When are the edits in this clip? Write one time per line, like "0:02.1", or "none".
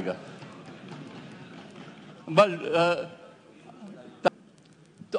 0:04.3